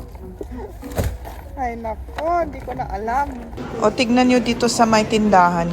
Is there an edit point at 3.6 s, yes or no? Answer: yes